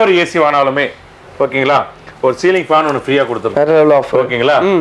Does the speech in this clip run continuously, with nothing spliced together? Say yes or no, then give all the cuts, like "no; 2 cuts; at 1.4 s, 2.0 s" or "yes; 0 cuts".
yes; 0 cuts